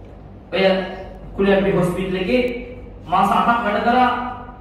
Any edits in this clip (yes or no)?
no